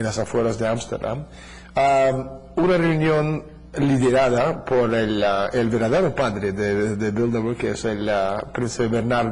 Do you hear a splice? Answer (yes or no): yes